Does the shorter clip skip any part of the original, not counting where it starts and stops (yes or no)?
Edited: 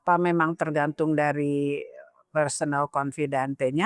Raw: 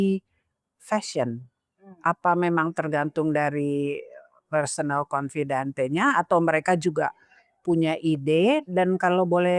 no